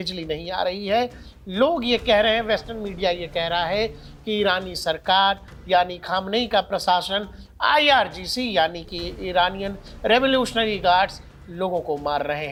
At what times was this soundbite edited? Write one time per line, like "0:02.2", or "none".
none